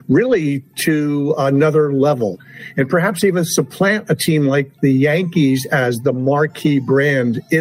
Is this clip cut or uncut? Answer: cut